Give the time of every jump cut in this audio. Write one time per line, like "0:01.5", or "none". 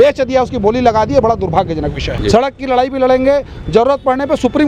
0:02.1